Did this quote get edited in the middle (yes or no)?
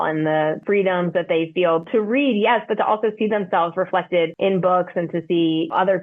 yes